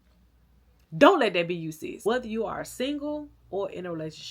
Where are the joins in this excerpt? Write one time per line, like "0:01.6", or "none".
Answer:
0:01.9